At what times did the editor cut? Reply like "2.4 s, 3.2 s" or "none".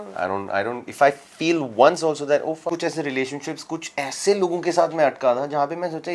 2.7 s